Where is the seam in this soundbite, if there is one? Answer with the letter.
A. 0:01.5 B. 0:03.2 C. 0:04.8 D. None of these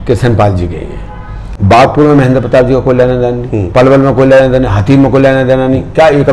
A